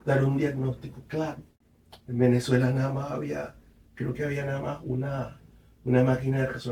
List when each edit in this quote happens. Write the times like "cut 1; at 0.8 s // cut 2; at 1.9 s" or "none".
cut 1; at 1.5 s